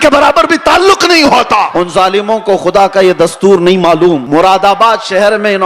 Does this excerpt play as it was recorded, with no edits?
no; 2 cuts; at 1.7 s, 4.2 s

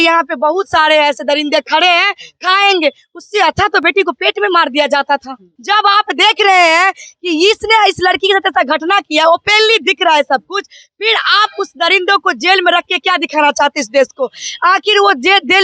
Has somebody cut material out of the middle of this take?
yes; 1 cut; at 5.5 s

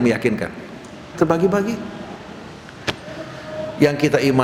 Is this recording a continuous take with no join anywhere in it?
yes; 0 cuts

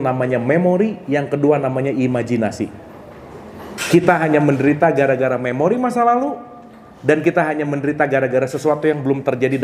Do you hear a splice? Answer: no; 0 cuts

